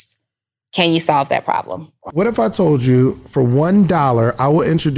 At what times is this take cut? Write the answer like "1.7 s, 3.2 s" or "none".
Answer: 2.0 s